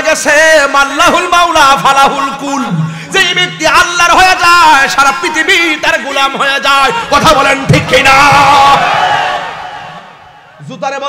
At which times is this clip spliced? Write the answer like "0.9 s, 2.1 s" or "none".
none